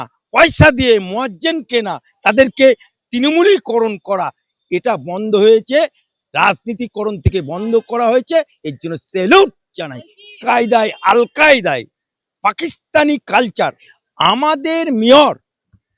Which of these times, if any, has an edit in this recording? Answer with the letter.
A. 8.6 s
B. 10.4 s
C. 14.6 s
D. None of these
B